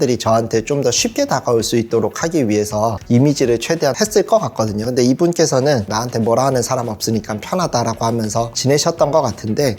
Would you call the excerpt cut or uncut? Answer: cut